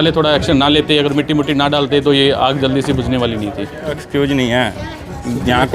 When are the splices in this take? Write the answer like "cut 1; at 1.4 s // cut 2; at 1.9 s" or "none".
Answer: cut 1; at 4.0 s